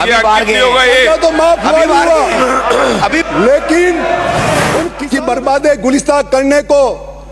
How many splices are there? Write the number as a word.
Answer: one